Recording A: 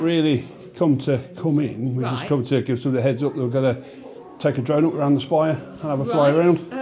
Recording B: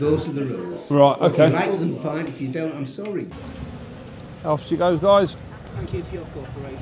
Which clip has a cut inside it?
B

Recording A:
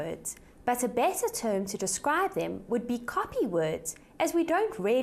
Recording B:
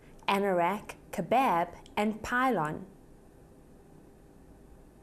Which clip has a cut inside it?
B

